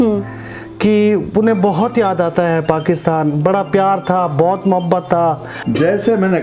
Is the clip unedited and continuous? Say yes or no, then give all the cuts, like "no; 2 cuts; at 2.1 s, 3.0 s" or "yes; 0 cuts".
no; 1 cut; at 5.5 s